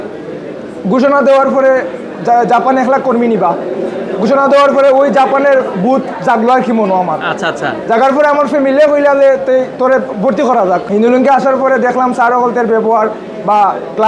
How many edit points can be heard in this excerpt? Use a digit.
1